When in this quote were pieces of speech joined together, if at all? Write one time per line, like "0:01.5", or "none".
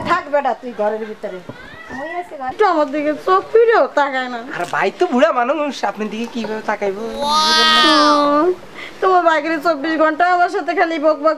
0:02.5